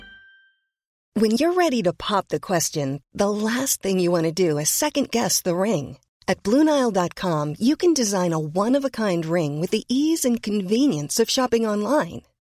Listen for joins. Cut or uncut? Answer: cut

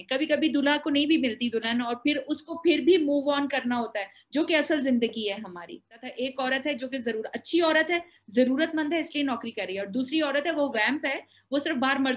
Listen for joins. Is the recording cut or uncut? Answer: cut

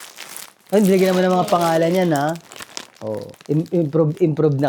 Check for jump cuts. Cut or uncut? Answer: cut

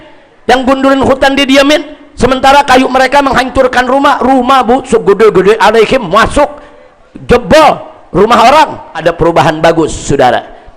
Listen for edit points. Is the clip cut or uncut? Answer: cut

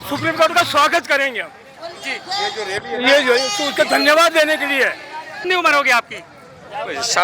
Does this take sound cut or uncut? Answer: cut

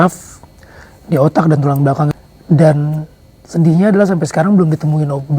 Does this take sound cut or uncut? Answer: cut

